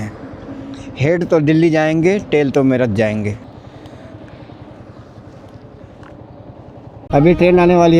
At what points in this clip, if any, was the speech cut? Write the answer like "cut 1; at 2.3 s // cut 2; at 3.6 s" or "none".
cut 1; at 3.5 s // cut 2; at 6.9 s